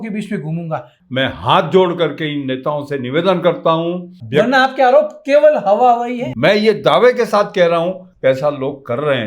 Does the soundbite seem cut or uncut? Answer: cut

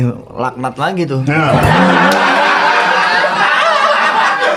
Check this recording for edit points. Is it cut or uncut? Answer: uncut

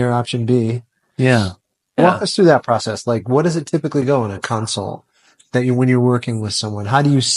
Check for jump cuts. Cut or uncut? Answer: cut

